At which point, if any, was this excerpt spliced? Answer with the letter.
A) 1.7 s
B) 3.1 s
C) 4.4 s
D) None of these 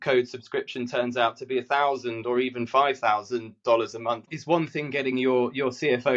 C